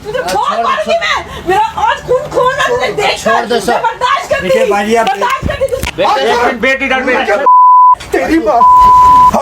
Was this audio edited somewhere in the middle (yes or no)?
yes